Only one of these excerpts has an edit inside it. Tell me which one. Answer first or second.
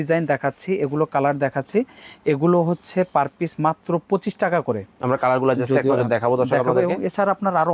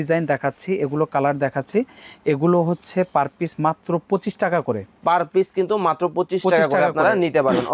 first